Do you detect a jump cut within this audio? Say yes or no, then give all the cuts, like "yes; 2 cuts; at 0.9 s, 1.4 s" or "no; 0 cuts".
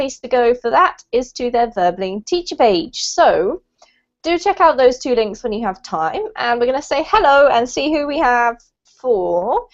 yes; 1 cut; at 0.9 s